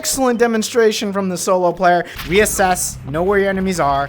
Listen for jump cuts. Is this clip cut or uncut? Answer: cut